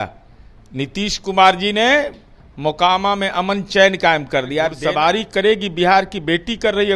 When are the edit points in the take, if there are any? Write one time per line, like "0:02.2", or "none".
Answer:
0:04.8